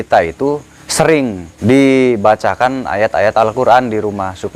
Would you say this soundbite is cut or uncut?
cut